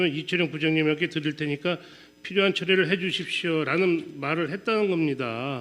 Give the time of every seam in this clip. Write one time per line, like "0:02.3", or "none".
0:04.3